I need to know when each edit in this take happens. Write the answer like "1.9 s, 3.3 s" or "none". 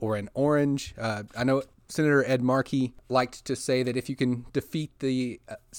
1.8 s, 3.0 s